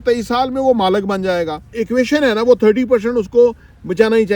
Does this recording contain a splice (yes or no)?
yes